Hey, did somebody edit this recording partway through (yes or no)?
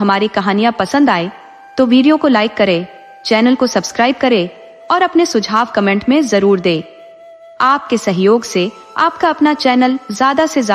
no